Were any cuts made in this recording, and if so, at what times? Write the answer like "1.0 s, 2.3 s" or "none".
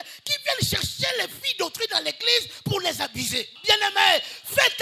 3.5 s